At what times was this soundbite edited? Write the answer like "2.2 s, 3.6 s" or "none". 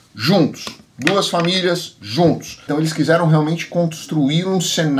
2.7 s